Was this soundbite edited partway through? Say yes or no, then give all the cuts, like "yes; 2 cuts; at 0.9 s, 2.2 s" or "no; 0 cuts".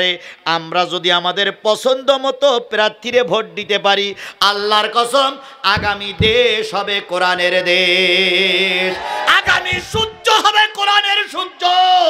no; 0 cuts